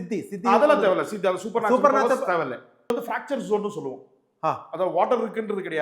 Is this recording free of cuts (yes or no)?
no